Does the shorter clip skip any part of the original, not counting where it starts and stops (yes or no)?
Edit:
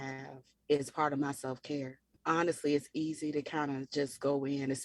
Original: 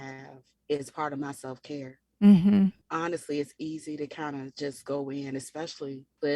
yes